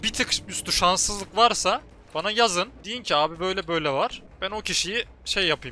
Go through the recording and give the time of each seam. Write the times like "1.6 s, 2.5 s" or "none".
2.0 s, 2.9 s, 4.3 s